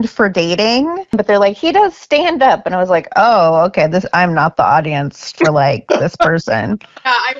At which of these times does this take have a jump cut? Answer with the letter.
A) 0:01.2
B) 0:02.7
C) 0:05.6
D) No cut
A